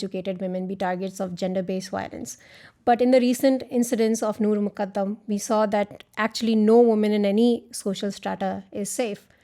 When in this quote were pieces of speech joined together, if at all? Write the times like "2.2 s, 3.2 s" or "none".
none